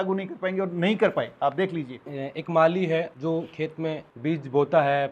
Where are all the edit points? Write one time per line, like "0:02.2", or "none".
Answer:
0:02.1
0:03.1
0:04.1